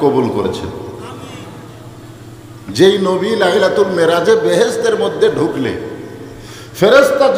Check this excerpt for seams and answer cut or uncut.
uncut